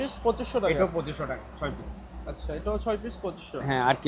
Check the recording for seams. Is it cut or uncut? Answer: uncut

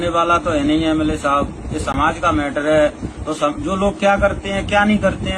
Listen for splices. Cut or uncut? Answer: uncut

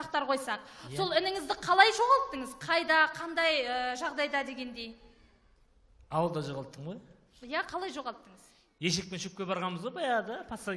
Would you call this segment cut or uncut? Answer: cut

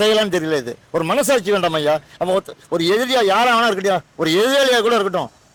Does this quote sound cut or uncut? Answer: uncut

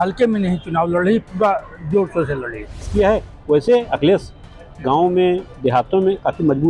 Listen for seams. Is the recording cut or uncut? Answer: cut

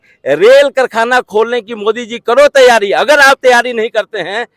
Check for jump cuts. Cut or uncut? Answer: uncut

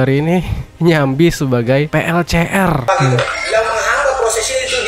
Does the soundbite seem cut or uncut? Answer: cut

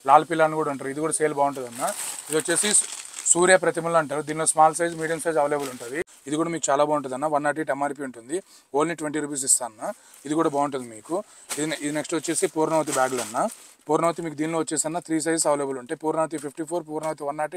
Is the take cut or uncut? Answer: cut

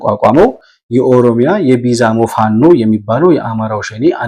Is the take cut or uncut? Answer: uncut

